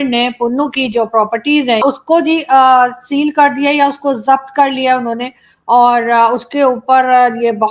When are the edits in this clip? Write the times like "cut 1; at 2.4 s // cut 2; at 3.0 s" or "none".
cut 1; at 1.8 s